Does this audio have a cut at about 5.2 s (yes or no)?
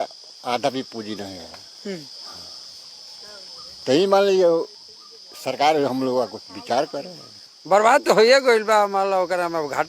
no